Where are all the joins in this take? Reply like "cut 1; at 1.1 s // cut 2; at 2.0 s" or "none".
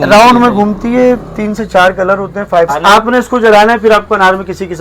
cut 1; at 2.8 s